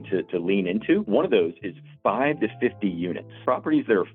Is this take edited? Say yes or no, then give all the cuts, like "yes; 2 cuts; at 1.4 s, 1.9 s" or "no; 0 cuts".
yes; 2 cuts; at 1.1 s, 3.3 s